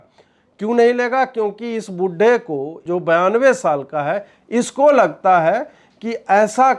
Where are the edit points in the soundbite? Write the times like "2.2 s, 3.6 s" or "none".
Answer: 2.7 s